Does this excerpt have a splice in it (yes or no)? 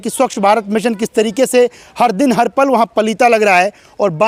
no